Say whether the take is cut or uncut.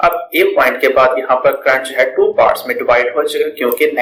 uncut